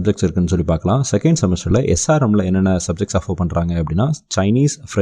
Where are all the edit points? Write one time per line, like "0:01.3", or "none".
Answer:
none

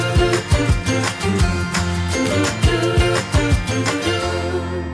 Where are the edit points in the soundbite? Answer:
none

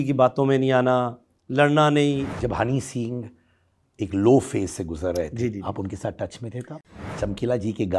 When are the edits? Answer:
0:02.3
0:06.9

